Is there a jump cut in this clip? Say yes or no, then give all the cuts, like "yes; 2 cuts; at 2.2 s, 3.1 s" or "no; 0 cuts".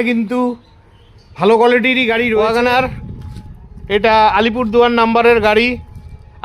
yes; 1 cut; at 2.4 s